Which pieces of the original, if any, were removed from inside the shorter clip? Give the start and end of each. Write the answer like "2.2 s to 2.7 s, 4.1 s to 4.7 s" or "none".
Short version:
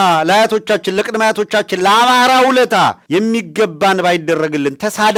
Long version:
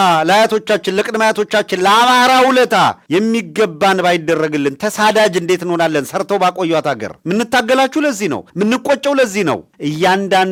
none